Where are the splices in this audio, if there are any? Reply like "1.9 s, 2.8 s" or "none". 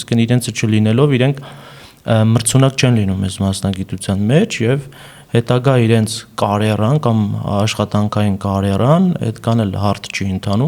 none